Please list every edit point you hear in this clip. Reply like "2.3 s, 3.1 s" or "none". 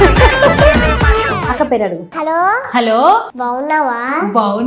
none